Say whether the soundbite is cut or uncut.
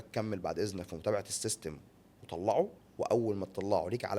cut